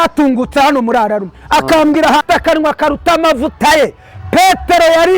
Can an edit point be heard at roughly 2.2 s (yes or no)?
yes